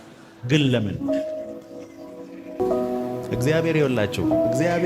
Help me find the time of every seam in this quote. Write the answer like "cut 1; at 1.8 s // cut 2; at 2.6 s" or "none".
cut 1; at 2.6 s